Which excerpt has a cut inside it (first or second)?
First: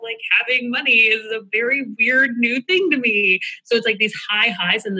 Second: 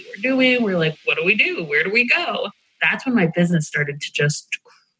second